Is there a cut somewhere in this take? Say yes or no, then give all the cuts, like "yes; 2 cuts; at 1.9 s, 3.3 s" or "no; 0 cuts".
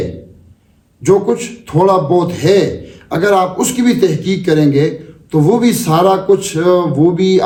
no; 0 cuts